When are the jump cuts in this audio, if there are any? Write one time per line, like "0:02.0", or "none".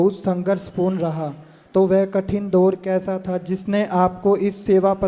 none